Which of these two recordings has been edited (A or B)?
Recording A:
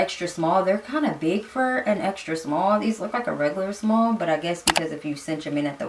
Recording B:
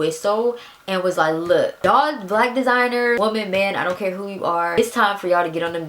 B